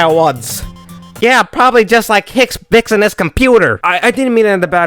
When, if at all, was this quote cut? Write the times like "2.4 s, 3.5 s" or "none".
3.8 s